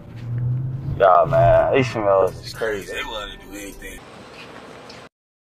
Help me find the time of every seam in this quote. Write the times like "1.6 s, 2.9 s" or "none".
4.0 s